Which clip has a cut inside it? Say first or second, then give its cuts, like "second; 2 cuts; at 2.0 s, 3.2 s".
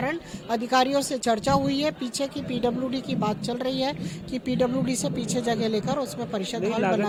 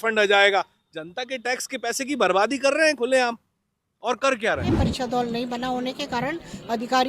second; 1 cut; at 4.8 s